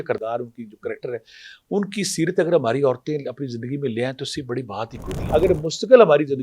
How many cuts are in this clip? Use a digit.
1